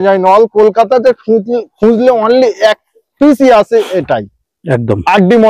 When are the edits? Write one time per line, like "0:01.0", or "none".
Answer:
none